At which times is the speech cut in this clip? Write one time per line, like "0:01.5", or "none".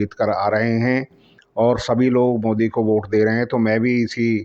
none

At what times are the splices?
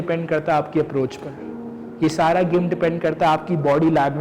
none

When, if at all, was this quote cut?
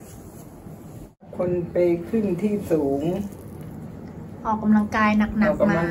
0:01.3

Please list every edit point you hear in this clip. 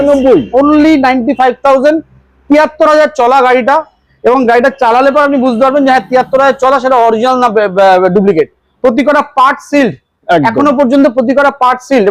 none

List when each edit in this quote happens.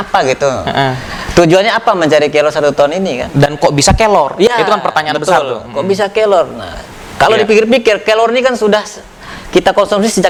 none

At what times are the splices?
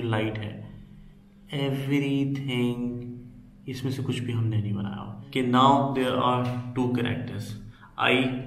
0:05.3

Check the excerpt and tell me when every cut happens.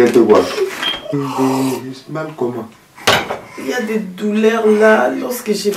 0:01.1

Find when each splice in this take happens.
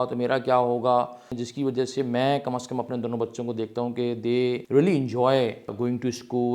0:01.4
0:04.6
0:05.7

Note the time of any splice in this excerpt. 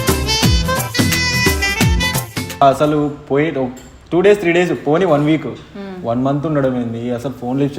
0:02.6

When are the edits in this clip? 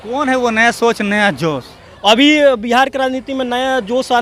none

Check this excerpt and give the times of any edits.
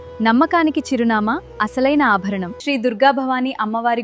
0:02.5

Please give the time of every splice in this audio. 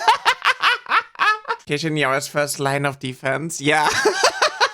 0:01.6

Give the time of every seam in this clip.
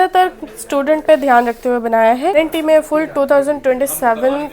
0:02.3

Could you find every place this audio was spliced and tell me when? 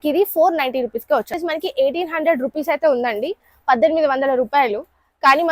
0:01.3

